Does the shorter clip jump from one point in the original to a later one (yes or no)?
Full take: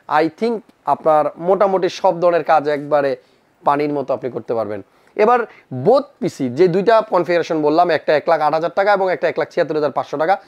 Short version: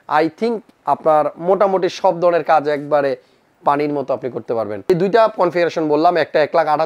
yes